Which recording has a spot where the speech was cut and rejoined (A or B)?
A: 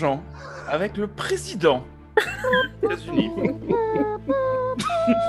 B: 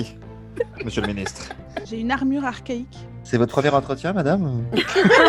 B